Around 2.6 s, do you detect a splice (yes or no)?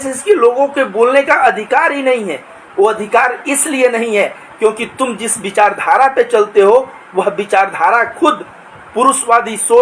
no